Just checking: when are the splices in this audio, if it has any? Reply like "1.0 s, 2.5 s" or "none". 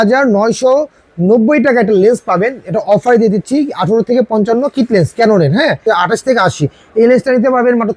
5.9 s